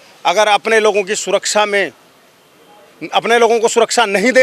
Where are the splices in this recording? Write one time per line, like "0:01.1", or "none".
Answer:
none